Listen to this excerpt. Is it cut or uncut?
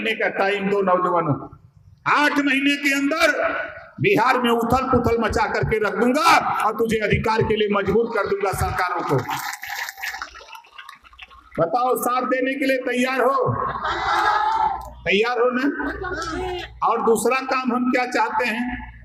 uncut